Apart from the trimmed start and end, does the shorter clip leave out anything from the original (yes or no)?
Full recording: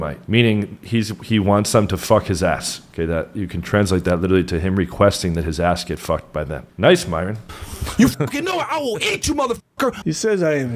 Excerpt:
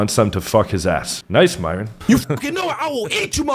yes